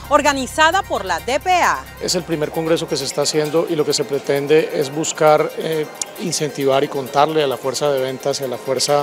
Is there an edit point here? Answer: yes; 1 cut; at 2.0 s

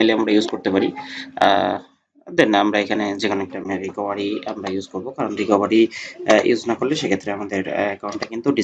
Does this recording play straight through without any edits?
yes; 0 cuts

